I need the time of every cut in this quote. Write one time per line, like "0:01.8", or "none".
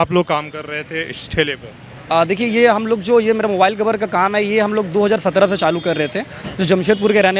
none